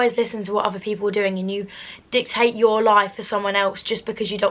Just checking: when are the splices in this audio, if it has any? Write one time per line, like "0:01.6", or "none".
none